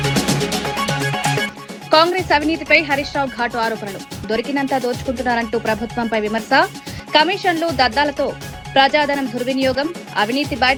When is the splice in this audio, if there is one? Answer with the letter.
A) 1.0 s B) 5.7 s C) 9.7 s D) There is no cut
D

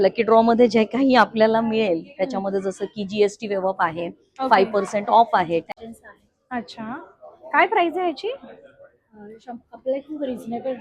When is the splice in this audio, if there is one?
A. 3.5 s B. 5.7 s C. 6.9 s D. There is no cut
B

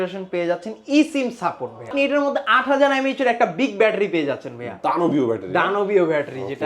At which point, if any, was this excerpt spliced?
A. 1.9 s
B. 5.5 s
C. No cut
A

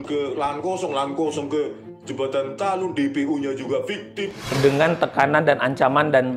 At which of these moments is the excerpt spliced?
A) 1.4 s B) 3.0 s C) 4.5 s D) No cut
C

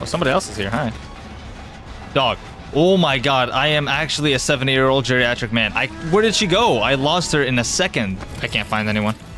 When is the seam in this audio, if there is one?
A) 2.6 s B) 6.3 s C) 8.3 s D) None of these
C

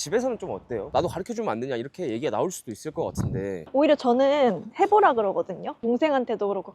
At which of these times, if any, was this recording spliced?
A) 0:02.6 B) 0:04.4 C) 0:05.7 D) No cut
C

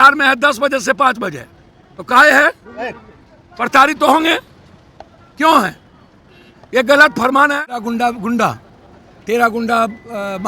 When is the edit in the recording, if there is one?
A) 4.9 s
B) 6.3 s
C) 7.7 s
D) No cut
C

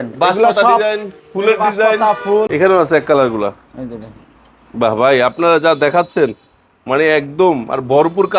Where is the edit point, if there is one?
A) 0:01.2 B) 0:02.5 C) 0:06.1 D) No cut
B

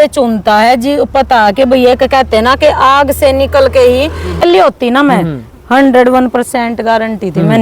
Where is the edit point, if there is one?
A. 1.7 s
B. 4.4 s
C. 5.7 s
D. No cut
B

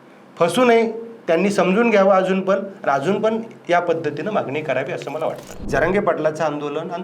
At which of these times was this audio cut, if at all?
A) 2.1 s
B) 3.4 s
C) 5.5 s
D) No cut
C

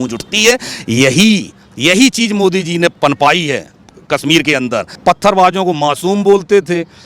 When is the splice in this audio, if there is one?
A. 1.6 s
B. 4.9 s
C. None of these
B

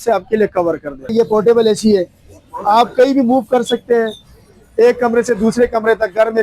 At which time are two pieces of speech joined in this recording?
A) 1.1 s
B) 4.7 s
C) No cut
A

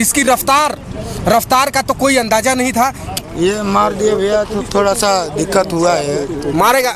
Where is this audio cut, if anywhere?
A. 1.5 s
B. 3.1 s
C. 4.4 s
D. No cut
B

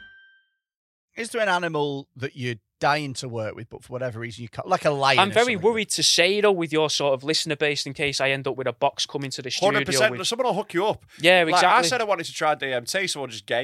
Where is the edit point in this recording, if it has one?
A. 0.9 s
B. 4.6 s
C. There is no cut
A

